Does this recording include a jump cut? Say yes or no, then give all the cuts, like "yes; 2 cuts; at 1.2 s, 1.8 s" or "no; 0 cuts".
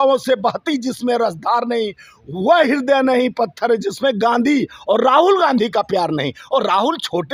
no; 0 cuts